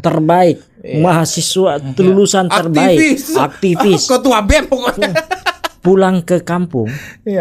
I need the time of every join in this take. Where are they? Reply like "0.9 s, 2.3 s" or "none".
none